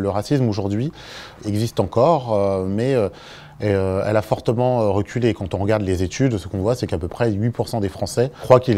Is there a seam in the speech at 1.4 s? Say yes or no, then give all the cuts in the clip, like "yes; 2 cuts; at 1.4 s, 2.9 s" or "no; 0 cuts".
yes; 1 cut; at 1.4 s